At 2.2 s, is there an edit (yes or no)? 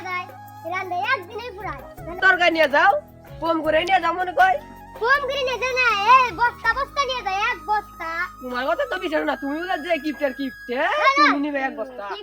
yes